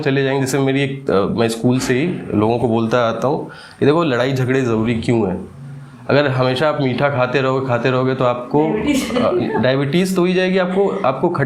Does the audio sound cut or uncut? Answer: uncut